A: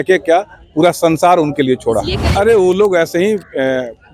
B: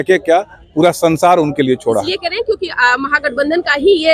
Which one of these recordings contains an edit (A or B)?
A